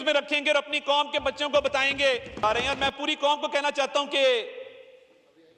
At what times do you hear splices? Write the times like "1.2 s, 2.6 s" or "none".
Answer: 2.4 s